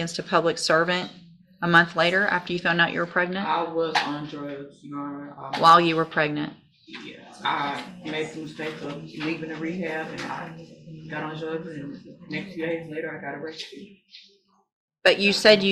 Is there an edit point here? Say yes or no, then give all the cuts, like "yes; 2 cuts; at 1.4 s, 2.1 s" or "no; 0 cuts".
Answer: no; 0 cuts